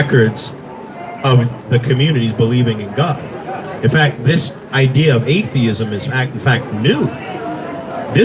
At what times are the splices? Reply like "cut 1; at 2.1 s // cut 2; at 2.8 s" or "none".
none